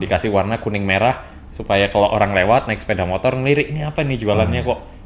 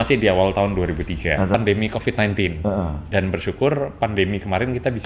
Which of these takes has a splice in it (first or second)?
second